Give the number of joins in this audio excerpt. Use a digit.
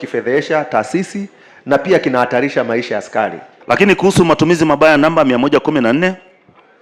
1